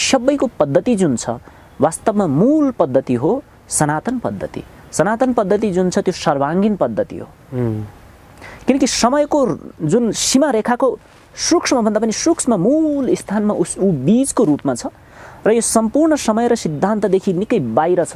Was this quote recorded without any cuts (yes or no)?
yes